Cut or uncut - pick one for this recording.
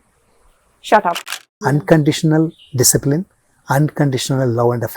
cut